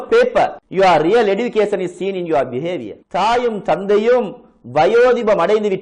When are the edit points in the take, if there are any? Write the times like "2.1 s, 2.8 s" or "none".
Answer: 2.9 s